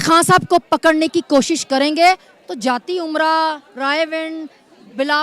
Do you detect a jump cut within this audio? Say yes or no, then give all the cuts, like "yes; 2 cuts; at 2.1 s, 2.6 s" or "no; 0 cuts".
no; 0 cuts